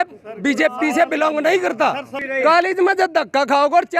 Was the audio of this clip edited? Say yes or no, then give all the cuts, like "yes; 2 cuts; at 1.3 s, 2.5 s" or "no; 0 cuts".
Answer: yes; 1 cut; at 2.1 s